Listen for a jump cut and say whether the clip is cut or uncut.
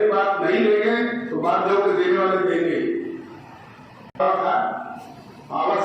cut